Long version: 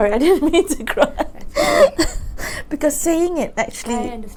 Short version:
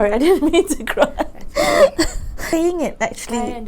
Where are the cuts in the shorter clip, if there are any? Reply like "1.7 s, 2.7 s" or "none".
2.5 s